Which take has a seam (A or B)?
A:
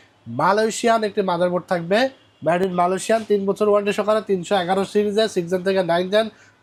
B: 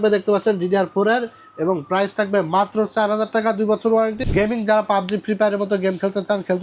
B